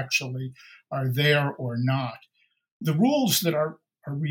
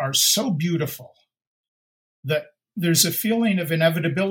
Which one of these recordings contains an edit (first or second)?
first